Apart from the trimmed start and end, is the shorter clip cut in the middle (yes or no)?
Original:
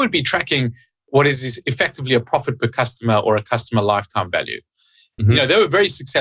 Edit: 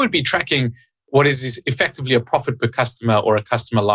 no